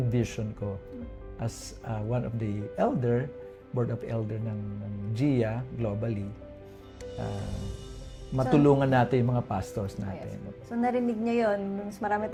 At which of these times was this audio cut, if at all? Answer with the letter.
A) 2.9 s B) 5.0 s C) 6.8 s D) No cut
D